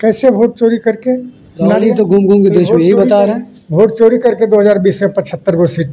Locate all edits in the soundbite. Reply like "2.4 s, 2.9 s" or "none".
none